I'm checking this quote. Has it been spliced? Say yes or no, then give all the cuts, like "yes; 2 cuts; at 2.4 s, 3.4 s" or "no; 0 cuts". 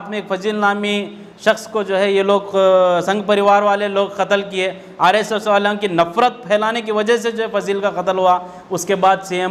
no; 0 cuts